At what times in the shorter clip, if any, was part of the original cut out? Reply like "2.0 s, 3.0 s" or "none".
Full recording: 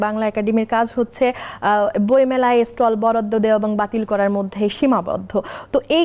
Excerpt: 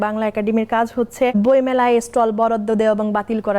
1.3 s